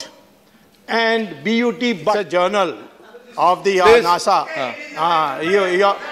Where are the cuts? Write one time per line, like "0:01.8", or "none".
0:02.1